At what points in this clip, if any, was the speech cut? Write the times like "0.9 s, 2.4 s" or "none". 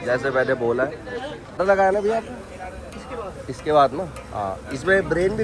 1.6 s